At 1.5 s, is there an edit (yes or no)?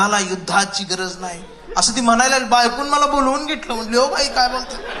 no